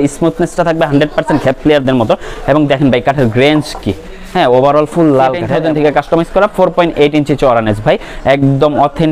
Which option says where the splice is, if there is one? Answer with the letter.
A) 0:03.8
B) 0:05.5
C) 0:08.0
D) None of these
B